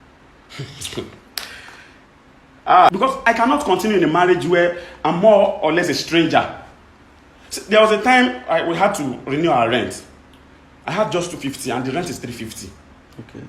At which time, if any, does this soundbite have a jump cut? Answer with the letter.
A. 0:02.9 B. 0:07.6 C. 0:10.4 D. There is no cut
A